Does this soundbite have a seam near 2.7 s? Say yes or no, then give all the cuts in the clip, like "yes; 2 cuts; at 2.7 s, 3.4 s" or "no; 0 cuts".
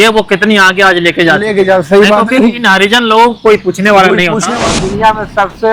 no; 1 cut; at 4.8 s